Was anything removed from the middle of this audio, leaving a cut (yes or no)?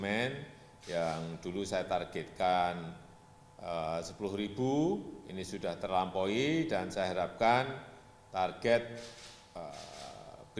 no